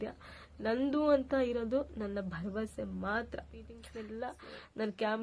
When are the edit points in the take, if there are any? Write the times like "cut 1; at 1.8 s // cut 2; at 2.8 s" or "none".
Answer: cut 1; at 3.8 s